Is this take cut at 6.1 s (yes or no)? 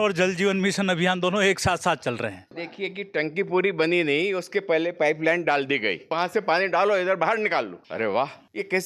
yes